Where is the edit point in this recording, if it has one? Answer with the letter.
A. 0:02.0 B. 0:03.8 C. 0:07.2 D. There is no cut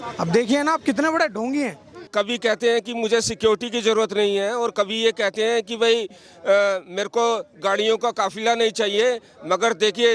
A